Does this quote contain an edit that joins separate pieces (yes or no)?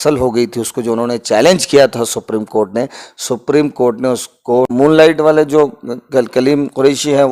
yes